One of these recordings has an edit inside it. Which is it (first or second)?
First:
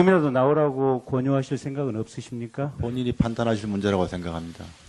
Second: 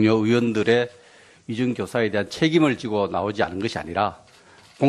second